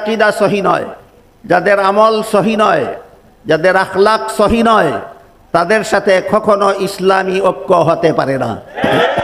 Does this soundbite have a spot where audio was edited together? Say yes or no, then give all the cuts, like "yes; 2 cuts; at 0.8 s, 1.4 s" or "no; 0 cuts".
no; 0 cuts